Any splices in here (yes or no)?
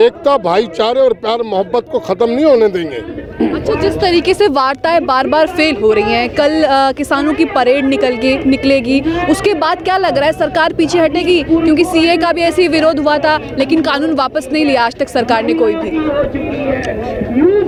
no